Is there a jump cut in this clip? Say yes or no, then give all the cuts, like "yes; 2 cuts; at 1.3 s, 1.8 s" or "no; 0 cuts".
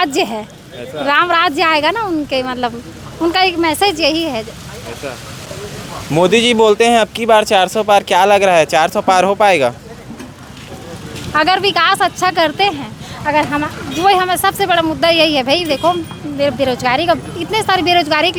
no; 0 cuts